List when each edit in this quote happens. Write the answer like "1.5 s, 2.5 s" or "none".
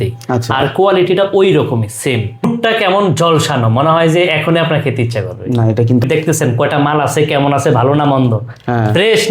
2.4 s, 6.0 s

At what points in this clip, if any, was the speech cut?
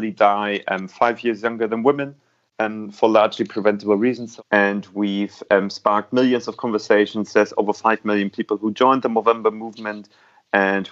4.3 s

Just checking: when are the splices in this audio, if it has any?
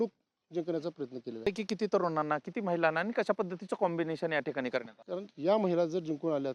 1.5 s, 5.0 s

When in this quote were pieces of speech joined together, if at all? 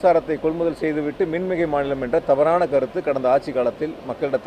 none

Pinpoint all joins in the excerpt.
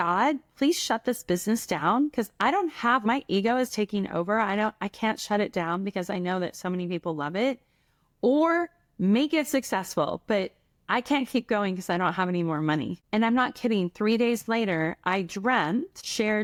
none

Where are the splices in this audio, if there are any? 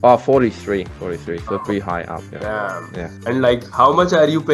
0.9 s, 2.3 s, 3.1 s

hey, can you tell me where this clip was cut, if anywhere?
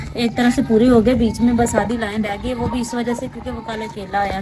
none

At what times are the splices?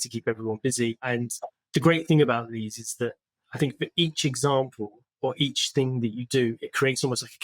1.0 s

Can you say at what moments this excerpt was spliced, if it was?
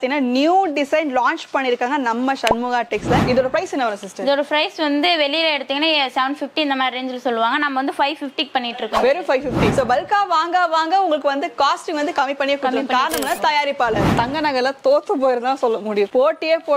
3.2 s, 9.7 s, 14.1 s

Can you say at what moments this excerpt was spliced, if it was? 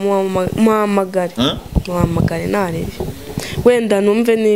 none

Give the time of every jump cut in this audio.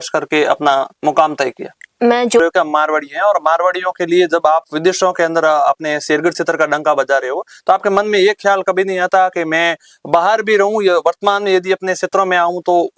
2.4 s

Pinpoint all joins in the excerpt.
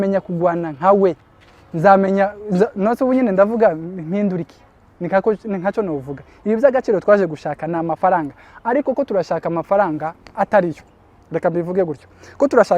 none

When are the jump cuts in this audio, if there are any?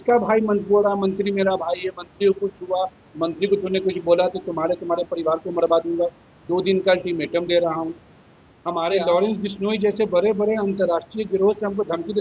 8.9 s

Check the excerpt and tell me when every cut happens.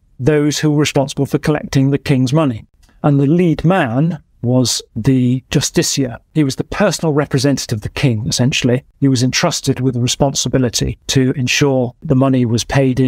2.7 s, 6.2 s, 8.9 s, 10.9 s, 12.0 s

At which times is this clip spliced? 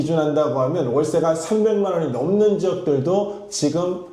none

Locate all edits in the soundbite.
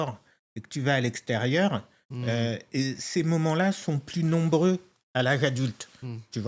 none

